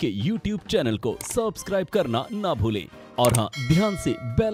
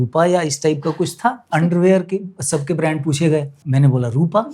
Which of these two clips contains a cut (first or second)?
second